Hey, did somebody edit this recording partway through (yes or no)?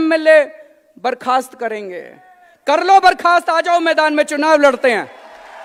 no